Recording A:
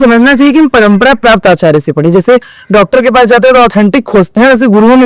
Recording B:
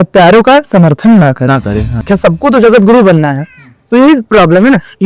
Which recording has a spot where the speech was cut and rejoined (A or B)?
B